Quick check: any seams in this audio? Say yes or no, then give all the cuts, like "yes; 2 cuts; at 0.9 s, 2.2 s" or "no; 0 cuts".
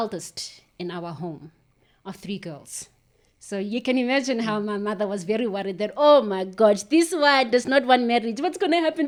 no; 0 cuts